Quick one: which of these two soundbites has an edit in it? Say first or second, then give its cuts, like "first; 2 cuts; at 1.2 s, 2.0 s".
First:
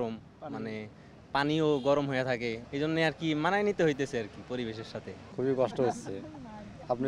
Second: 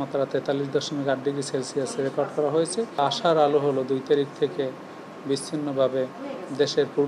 first; 2 cuts; at 2.6 s, 5.2 s